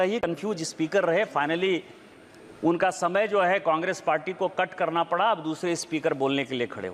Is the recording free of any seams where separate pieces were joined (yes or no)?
yes